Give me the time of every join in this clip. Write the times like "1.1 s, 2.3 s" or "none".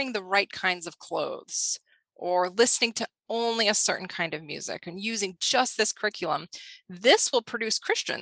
none